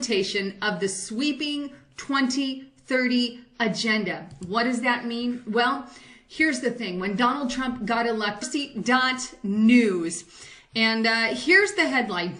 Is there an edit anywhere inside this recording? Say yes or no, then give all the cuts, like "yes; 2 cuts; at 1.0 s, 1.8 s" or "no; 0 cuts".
no; 0 cuts